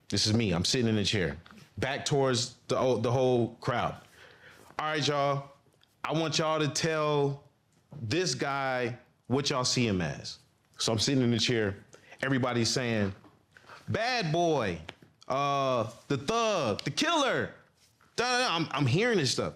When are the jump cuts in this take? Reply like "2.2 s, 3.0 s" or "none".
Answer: none